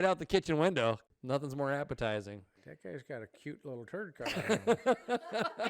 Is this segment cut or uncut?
cut